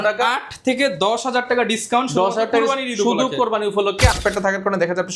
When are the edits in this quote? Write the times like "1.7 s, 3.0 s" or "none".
4.2 s